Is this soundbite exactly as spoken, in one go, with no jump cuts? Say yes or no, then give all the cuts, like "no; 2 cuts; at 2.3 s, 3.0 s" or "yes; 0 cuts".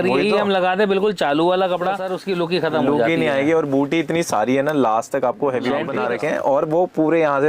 no; 2 cuts; at 1.9 s, 5.9 s